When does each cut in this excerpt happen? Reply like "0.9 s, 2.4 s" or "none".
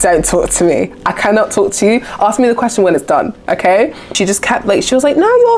4.2 s